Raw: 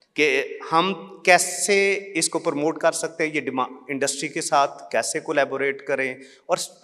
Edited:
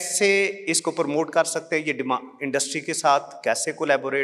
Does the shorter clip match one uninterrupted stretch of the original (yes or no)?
yes